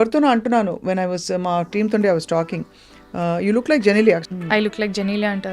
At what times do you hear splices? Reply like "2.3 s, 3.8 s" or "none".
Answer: 4.2 s